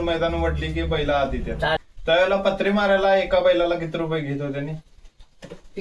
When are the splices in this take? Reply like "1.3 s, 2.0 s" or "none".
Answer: 1.8 s